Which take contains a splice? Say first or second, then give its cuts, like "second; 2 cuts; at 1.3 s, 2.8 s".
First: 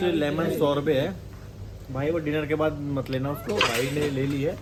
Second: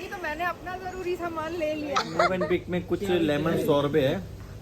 second; 1 cut; at 2.1 s